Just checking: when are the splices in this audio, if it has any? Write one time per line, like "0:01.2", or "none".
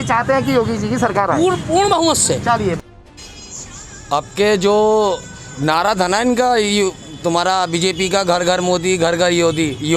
0:02.8